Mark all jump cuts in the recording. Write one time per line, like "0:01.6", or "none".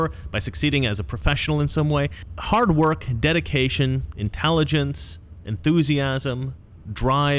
0:02.3